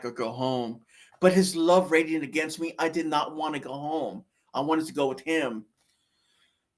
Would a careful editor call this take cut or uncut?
uncut